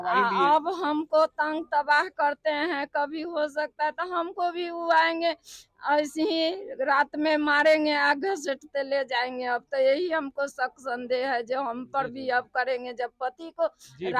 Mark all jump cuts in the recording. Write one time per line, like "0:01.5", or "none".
none